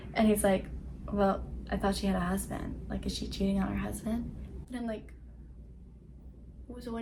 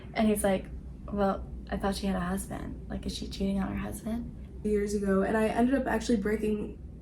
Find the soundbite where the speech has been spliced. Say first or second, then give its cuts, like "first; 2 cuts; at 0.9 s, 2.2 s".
second; 1 cut; at 4.6 s